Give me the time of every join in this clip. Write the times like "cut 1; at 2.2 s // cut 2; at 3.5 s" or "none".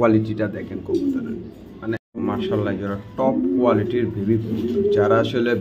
cut 1; at 2.1 s